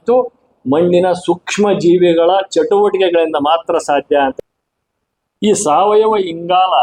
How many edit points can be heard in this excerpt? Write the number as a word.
one